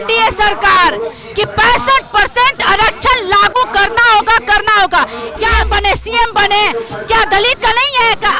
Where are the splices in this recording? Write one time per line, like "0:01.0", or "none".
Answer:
0:05.6